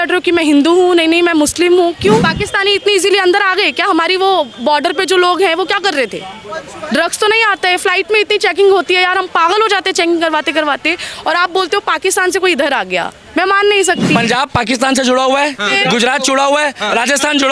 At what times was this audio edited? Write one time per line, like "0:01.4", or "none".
0:02.4
0:14.1